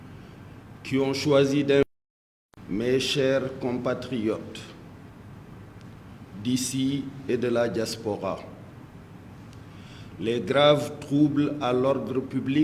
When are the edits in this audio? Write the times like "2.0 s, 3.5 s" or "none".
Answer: 1.9 s